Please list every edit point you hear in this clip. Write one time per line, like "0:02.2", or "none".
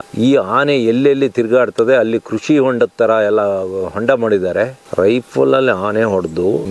0:04.8